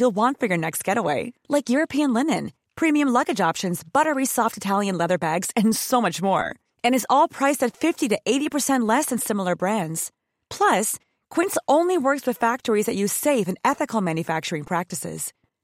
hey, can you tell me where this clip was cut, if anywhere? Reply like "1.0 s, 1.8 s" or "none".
none